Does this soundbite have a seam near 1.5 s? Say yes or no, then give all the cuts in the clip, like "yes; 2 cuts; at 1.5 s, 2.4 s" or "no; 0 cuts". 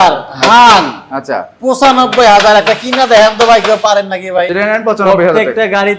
no; 1 cut; at 4.5 s